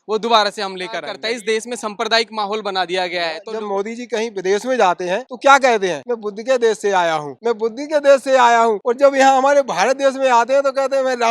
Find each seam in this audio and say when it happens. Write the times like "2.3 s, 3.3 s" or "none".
1.2 s, 3.4 s, 5.3 s, 6.1 s, 7.3 s, 8.8 s